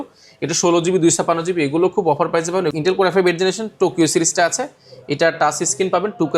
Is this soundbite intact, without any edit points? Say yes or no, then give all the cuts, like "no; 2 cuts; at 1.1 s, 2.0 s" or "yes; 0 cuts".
no; 1 cut; at 2.7 s